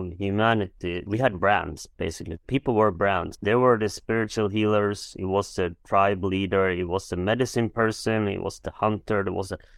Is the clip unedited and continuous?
no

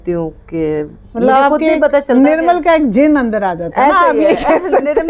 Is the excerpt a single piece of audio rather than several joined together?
yes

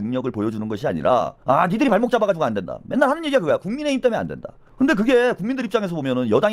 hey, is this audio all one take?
yes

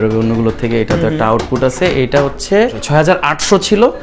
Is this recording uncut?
no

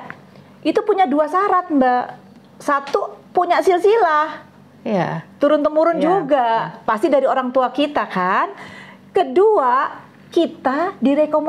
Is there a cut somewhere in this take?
no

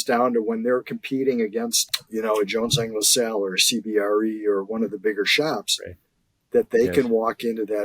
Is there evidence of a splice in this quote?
yes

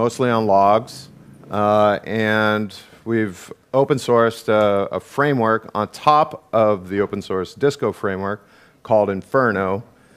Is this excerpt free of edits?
no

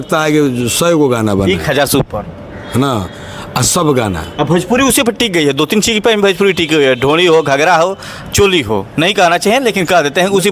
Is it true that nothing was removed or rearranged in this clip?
yes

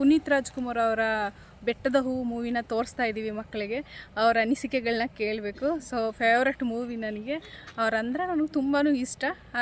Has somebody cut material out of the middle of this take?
no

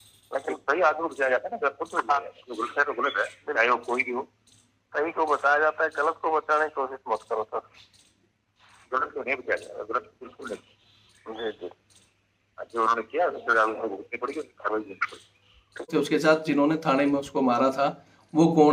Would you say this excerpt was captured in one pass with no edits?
no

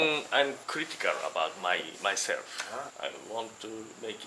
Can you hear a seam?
no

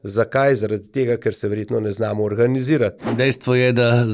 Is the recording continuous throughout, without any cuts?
no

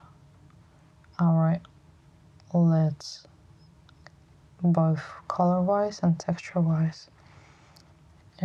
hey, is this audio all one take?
yes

